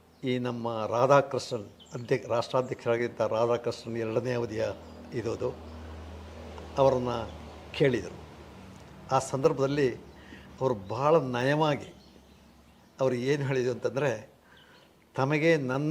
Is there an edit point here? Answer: no; 0 cuts

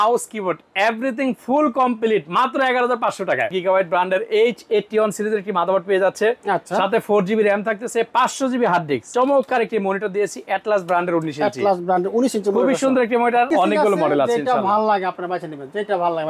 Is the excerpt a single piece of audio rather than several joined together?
no; 3 cuts; at 3.5 s, 9.1 s, 13.5 s

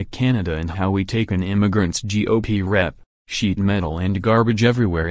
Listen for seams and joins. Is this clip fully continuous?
yes; 0 cuts

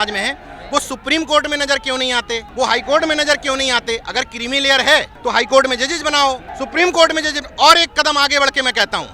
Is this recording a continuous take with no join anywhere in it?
no; 3 cuts; at 2.5 s, 5.1 s, 6.5 s

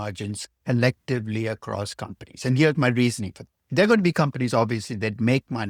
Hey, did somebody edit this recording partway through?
no; 0 cuts

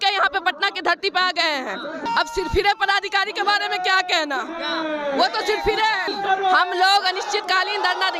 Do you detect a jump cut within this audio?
yes; 2 cuts; at 2.1 s, 6.1 s

